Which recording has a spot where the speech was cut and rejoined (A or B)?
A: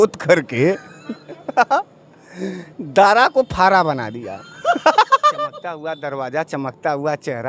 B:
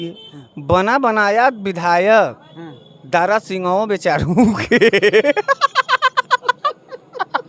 A